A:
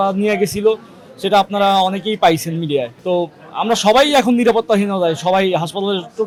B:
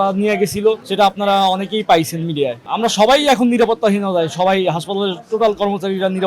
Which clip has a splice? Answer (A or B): B